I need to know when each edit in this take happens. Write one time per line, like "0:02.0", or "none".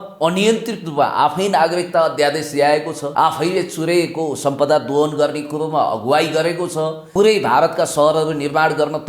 0:03.0
0:07.0